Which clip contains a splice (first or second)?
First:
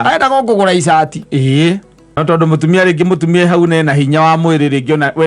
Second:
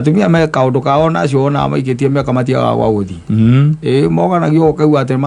first